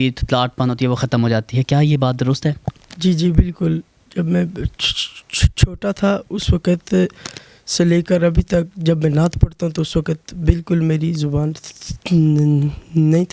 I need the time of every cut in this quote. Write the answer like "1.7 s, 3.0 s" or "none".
none